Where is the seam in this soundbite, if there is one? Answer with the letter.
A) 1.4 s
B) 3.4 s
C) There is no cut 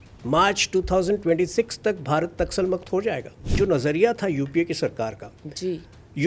B